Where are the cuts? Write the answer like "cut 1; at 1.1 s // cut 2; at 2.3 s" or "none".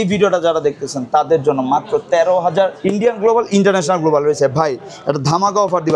cut 1; at 2.8 s

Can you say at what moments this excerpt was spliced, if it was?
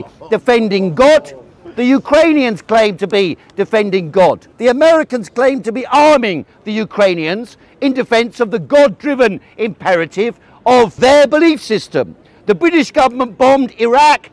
cut 1; at 4.5 s // cut 2; at 10.9 s

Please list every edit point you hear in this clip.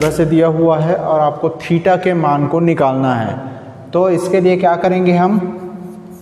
none

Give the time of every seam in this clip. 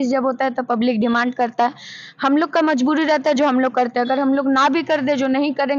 none

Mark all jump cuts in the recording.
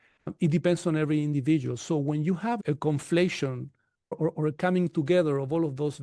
cut 1; at 4.2 s

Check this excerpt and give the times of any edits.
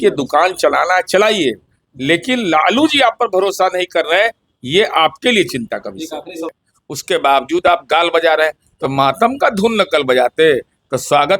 cut 1; at 6.4 s

